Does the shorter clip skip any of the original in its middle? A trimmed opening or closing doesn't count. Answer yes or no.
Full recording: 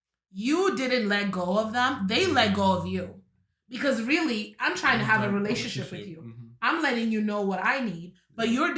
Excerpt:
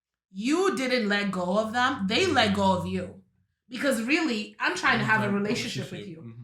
no